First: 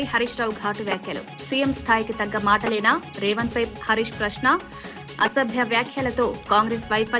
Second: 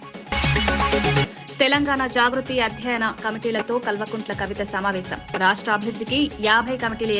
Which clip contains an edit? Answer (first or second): second